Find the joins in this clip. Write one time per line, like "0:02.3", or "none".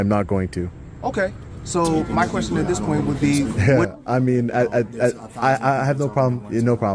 0:03.5